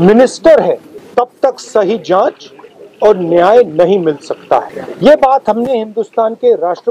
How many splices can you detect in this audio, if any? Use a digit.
2